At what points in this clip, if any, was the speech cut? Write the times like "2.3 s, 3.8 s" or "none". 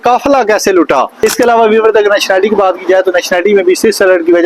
1.1 s